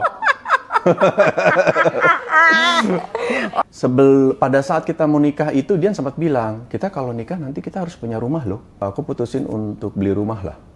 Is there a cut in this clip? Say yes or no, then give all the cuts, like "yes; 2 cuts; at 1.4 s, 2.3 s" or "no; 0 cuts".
yes; 2 cuts; at 3.6 s, 8.8 s